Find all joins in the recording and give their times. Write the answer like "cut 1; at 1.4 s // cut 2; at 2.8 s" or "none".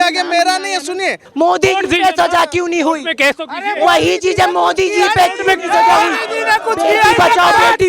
cut 1; at 1.2 s

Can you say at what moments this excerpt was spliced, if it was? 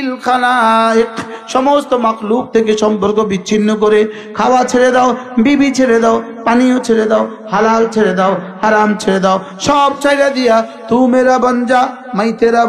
none

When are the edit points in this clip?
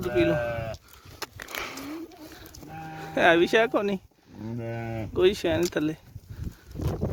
none

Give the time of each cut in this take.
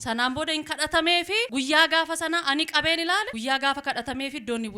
cut 1; at 1.5 s // cut 2; at 3.3 s

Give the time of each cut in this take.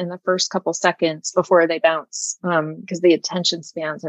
none

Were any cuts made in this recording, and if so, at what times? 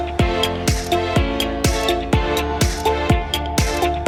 none

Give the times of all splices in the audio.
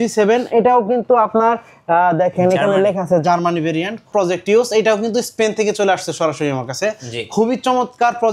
cut 1; at 4.1 s

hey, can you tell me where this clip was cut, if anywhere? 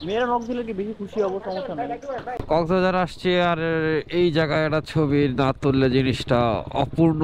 cut 1; at 2.3 s

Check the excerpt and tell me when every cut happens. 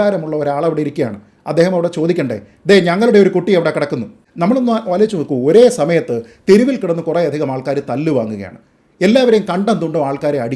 cut 1; at 4.2 s

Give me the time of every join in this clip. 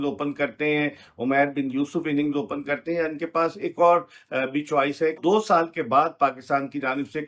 cut 1; at 5.2 s

